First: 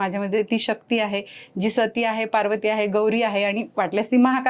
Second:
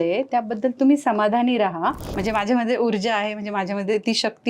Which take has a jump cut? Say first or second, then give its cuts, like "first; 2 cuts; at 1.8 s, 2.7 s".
second; 1 cut; at 2.1 s